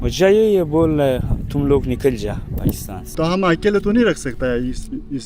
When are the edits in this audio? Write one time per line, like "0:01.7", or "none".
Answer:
0:03.1